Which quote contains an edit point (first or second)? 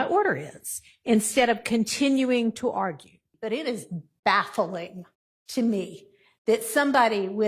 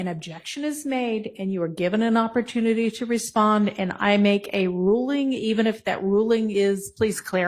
first